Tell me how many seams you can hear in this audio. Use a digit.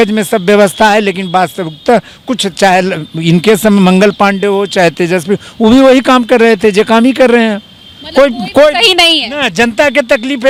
0